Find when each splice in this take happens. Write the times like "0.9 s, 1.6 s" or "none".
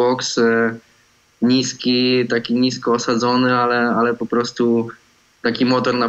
none